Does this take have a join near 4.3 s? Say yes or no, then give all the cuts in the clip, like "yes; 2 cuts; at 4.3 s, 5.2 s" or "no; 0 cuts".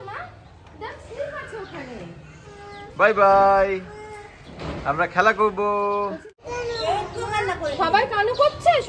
no; 1 cut; at 6.3 s